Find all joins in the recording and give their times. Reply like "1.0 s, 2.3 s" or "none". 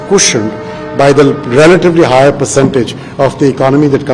none